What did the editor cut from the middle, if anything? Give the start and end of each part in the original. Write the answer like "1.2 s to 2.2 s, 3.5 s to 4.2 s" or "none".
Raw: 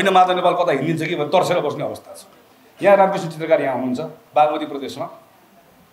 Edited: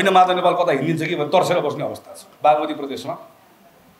2.2 s to 4.1 s